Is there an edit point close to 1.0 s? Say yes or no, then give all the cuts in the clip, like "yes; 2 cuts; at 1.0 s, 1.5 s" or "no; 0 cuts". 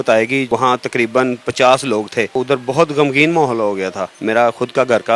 no; 2 cuts; at 2.3 s, 4.1 s